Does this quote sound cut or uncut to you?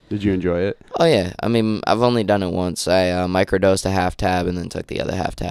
uncut